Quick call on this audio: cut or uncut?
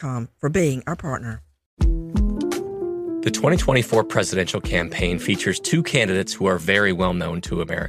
cut